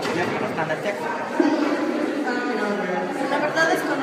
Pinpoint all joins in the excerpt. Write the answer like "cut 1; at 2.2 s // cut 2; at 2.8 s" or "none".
cut 1; at 1.7 s